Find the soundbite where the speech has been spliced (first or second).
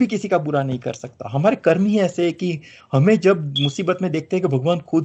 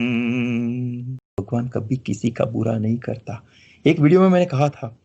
second